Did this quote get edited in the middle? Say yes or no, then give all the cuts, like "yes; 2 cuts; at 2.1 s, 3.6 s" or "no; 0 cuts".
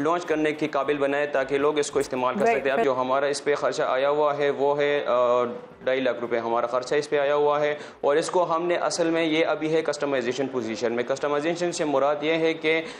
yes; 1 cut; at 2.8 s